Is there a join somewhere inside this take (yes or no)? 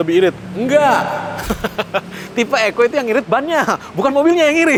no